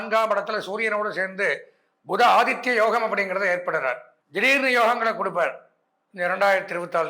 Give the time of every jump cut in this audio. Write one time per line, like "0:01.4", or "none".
0:04.1